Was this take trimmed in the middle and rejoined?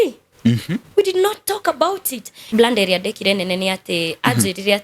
yes; 1 cut; at 2.4 s

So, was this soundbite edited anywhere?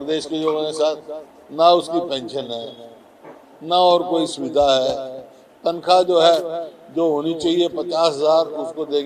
no; 0 cuts

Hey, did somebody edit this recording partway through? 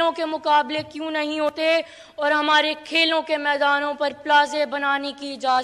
no; 0 cuts

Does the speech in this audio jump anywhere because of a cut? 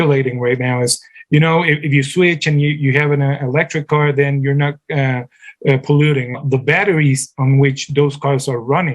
yes; 1 cut; at 6.4 s

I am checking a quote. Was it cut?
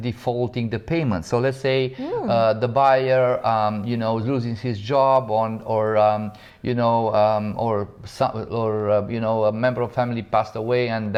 no; 0 cuts

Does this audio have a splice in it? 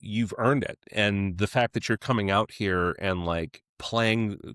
no; 0 cuts

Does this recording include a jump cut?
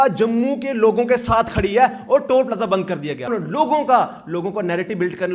yes; 1 cut; at 3.3 s

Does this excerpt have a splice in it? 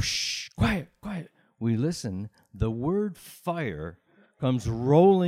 no; 0 cuts

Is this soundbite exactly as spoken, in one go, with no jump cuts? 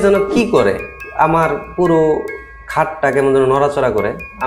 yes; 0 cuts

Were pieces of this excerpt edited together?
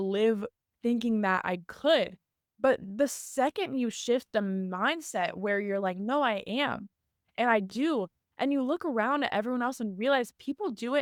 no; 0 cuts

